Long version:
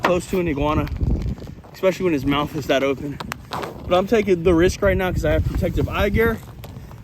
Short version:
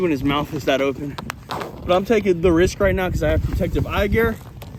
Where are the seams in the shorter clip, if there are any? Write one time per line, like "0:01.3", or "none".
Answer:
none